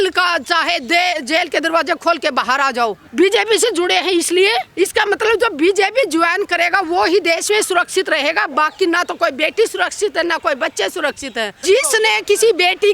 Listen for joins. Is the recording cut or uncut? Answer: cut